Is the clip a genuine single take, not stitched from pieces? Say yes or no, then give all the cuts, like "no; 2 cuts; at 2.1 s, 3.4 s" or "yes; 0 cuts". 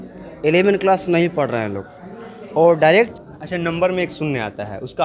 no; 1 cut; at 3.1 s